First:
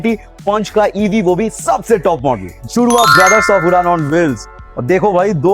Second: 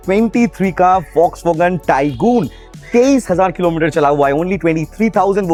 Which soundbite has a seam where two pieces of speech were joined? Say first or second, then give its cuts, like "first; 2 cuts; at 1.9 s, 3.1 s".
first; 1 cut; at 2.5 s